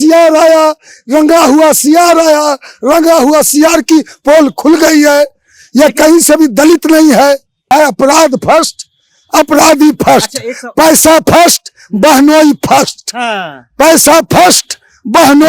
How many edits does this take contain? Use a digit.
1